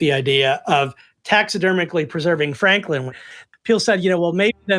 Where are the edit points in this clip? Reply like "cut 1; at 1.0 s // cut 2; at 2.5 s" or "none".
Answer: cut 1; at 3.2 s

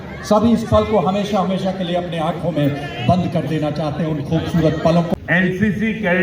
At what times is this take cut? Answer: cut 1; at 5.1 s

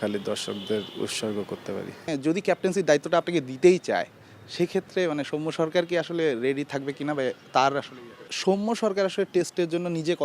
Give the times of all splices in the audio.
cut 1; at 2.1 s // cut 2; at 8.3 s

